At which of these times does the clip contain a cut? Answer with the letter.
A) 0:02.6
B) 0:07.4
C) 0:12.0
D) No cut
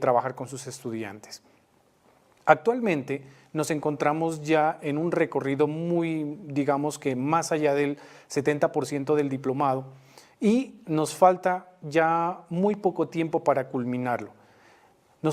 B